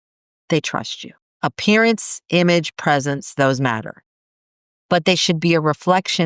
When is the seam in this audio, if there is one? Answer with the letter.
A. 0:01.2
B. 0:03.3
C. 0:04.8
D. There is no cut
A